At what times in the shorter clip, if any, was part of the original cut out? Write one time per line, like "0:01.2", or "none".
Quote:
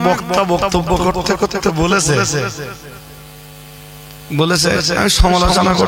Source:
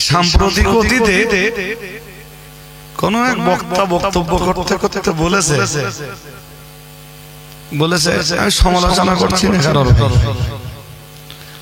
none

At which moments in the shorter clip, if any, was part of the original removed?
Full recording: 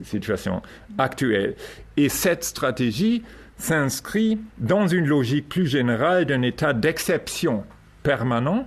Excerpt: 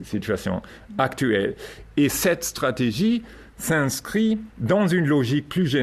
none

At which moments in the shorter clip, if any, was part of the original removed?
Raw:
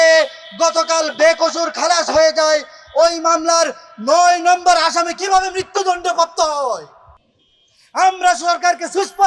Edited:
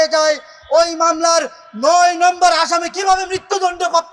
none

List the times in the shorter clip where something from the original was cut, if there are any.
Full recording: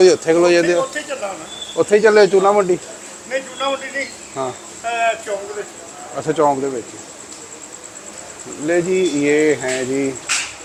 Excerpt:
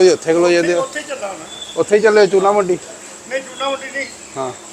none

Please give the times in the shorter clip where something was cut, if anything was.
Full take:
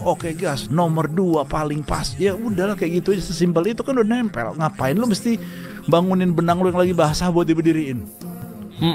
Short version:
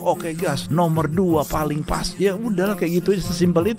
none

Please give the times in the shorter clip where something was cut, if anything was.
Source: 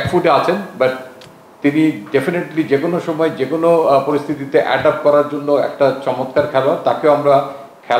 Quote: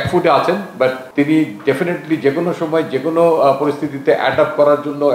0:01.0

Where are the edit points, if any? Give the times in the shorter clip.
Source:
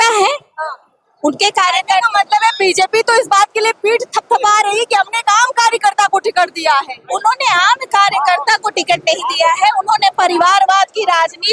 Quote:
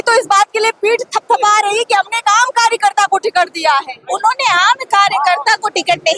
none

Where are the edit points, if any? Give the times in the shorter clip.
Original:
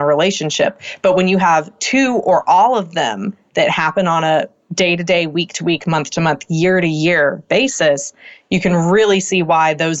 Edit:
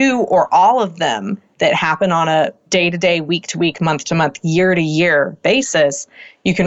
0:02.6

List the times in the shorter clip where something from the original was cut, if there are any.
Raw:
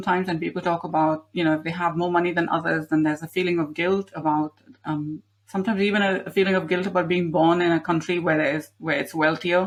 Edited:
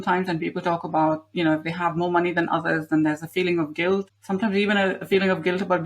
0:04.1

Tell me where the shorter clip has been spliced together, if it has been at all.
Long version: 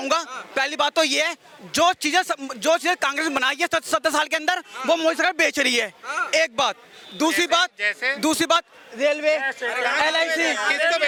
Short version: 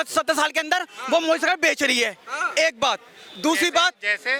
none

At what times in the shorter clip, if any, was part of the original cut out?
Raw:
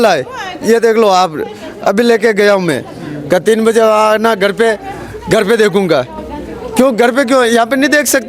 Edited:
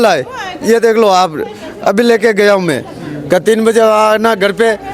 none

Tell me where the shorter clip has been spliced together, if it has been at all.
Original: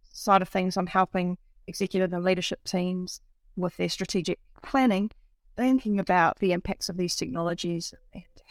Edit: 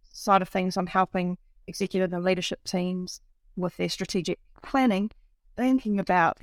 none

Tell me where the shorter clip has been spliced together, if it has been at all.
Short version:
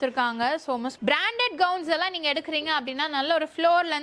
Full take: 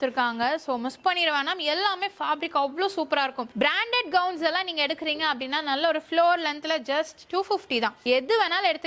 0:01.0

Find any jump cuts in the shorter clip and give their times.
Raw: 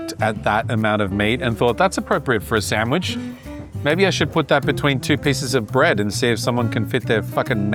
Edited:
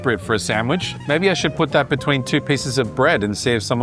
0:00.9

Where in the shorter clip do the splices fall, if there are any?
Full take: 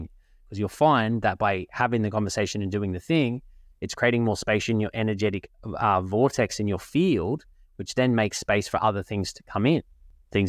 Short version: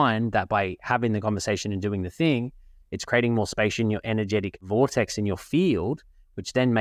0:04.6

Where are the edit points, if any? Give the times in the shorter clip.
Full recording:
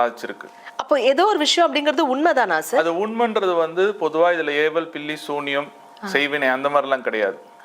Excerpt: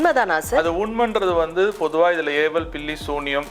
none

